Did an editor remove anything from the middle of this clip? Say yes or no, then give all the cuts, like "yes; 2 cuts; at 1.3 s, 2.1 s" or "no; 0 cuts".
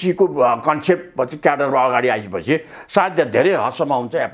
no; 0 cuts